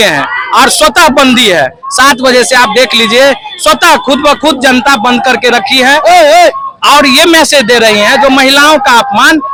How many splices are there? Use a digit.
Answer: 0